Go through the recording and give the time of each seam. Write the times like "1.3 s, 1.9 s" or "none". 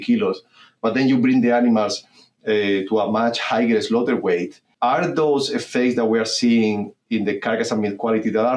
4.6 s